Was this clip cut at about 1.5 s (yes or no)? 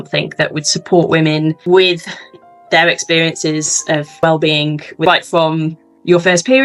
no